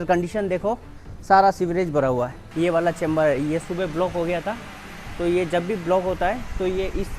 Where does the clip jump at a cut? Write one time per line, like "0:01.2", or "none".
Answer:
0:02.4

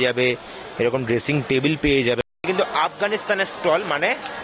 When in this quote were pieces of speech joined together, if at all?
0:02.2

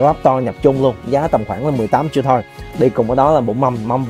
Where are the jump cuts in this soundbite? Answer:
none

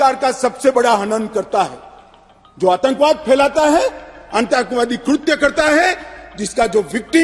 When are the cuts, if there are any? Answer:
none

